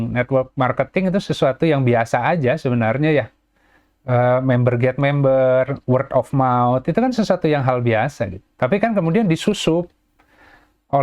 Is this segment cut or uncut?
uncut